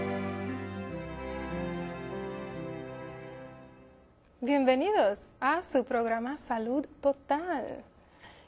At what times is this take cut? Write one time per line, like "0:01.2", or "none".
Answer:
none